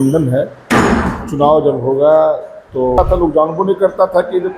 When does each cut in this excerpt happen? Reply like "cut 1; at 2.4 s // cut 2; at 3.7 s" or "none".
cut 1; at 3.0 s